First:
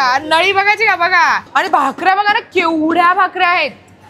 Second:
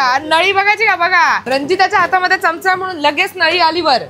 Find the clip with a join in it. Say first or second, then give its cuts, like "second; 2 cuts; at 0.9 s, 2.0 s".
first; 1 cut; at 1.4 s